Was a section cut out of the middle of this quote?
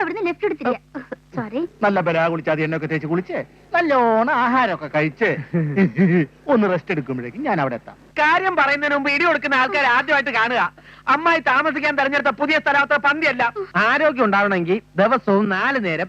yes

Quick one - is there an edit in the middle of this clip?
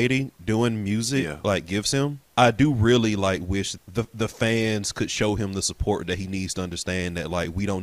yes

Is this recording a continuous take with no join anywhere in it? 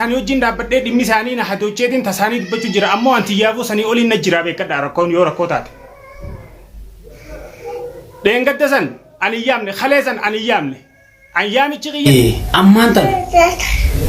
no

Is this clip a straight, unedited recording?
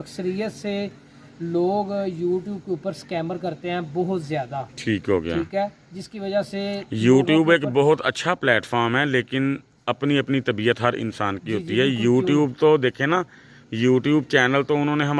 yes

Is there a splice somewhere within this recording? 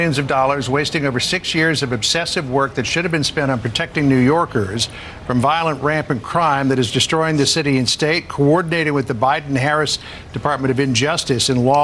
no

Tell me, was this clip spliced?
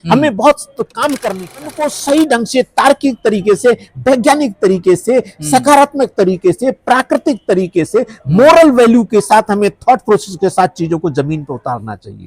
yes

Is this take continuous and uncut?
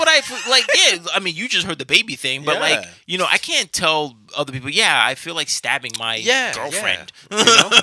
yes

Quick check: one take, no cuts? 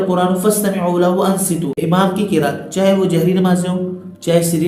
no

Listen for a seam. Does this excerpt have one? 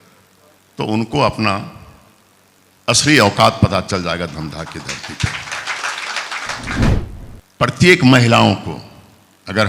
yes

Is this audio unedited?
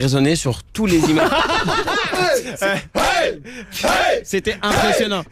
no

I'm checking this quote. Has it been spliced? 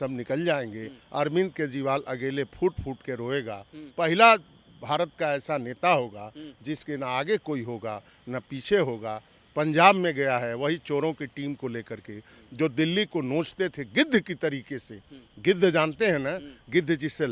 no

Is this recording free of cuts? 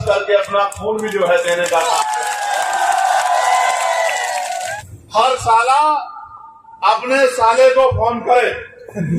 no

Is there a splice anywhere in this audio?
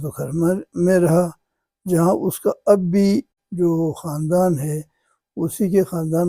yes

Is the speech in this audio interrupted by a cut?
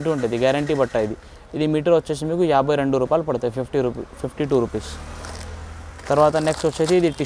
no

